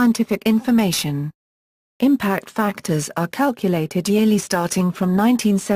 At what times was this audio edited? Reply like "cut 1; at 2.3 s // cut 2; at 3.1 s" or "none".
none